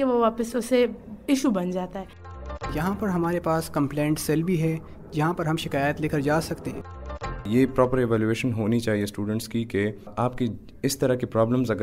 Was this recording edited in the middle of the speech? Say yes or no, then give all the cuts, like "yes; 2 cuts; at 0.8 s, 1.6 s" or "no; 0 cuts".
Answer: yes; 2 cuts; at 2.3 s, 7.1 s